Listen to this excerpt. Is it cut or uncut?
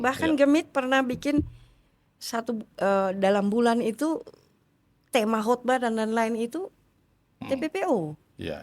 uncut